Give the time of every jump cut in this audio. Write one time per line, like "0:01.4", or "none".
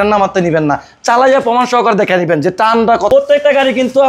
0:03.1